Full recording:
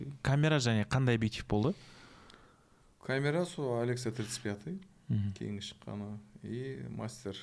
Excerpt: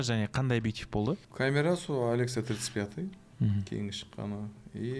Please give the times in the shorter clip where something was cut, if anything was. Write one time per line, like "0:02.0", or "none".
0:01.3